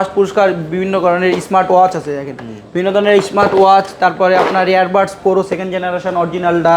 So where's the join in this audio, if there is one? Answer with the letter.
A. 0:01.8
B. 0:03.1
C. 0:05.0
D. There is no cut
D